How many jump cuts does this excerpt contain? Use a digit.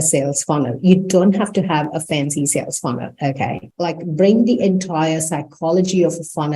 1